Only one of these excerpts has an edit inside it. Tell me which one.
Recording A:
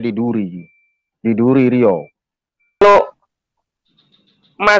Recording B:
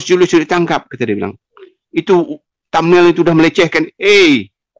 A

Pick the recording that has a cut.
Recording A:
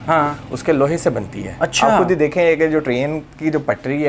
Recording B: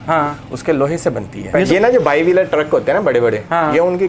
B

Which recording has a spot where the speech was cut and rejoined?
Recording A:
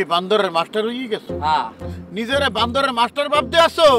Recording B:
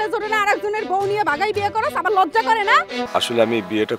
B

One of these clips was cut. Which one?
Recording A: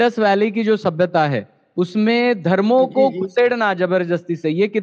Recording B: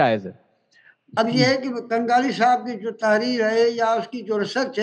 B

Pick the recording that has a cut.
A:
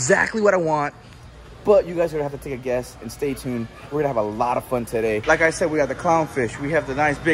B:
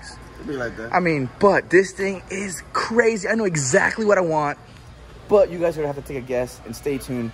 A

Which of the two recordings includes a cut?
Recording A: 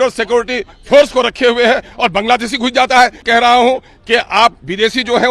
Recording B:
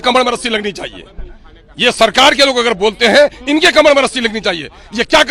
A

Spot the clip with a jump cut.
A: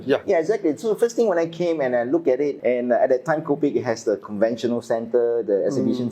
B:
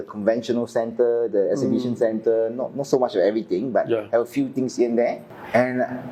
A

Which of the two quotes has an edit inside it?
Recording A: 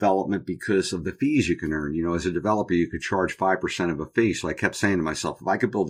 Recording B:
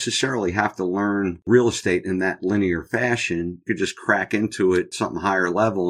B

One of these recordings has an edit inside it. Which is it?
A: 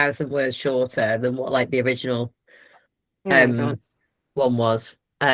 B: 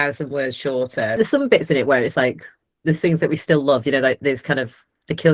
B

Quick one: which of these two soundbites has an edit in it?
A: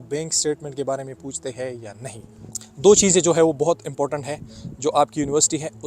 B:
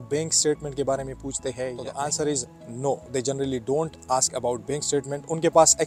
A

